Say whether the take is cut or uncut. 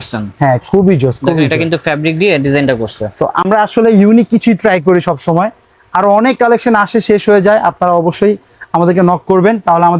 uncut